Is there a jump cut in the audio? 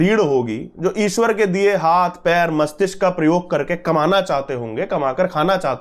no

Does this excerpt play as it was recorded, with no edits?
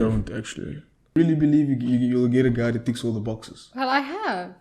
no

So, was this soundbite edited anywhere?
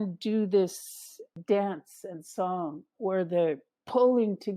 yes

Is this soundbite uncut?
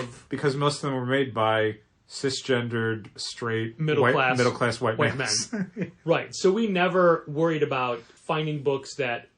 no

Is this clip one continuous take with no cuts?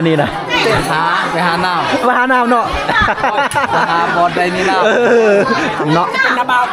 no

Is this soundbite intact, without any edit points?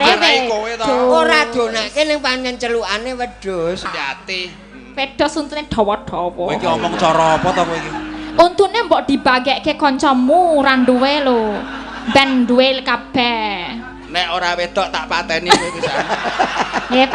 no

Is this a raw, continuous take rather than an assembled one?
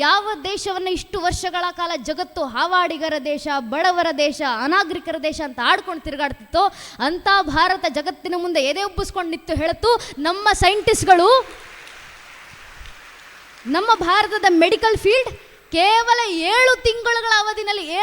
yes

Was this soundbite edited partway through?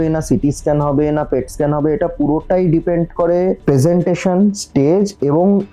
no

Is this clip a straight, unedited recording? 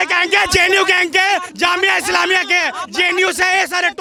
yes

